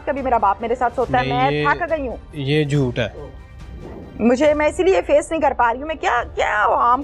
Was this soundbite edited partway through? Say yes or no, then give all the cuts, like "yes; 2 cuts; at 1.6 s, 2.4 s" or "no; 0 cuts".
no; 0 cuts